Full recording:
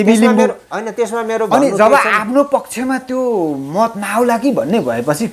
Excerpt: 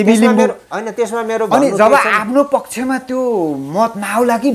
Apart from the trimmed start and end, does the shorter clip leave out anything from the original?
no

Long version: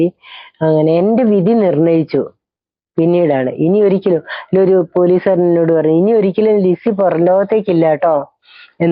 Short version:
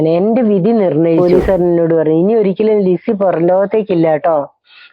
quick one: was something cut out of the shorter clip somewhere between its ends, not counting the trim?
yes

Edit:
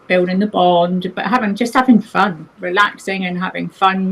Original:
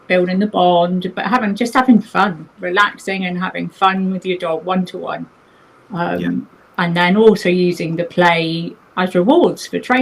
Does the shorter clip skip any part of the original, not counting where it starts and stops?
no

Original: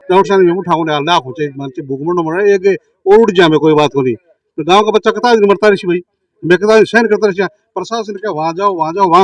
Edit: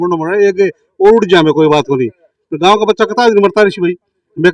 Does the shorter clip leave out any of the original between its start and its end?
no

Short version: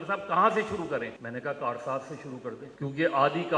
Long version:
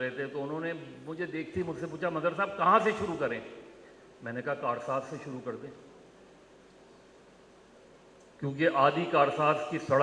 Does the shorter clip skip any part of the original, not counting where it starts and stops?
yes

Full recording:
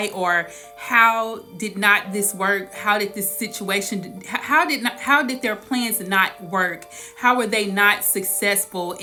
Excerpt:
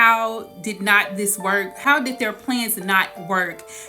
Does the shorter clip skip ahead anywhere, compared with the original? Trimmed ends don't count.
yes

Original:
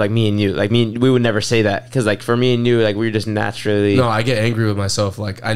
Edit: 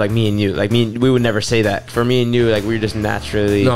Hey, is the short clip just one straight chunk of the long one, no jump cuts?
no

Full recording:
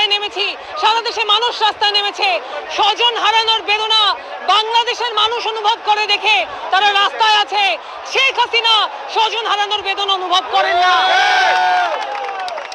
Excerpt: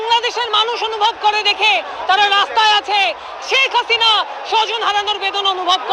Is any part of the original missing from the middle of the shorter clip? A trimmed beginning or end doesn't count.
no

